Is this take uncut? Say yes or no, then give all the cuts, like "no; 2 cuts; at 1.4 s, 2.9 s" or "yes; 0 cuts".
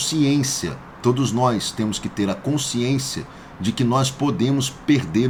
yes; 0 cuts